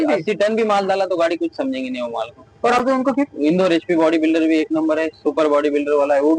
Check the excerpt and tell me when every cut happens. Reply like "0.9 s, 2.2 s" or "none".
2.8 s